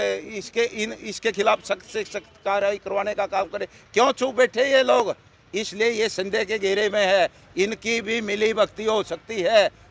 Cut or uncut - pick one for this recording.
uncut